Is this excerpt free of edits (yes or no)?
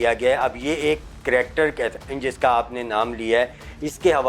yes